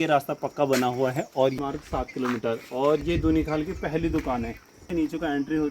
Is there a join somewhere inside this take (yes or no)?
yes